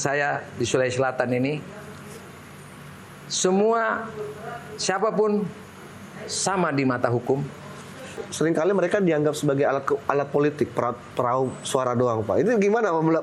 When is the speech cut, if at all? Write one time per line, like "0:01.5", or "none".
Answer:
0:08.1